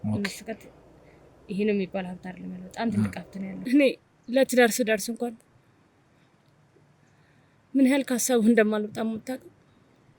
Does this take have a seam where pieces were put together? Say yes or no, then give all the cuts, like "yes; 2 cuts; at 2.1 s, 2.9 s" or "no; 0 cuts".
yes; 1 cut; at 3.6 s